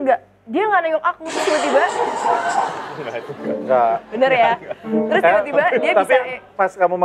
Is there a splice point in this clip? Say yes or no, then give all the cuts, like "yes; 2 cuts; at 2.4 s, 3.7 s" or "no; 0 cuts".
no; 0 cuts